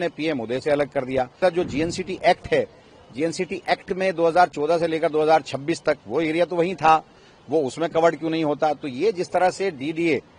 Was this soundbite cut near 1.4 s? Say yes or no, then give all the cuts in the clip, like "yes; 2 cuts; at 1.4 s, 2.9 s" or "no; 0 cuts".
yes; 1 cut; at 1.4 s